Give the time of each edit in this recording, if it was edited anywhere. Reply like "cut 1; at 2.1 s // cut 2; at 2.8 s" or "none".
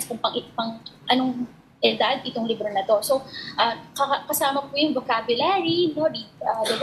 none